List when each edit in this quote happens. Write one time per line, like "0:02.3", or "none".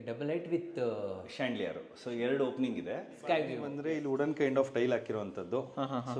0:03.7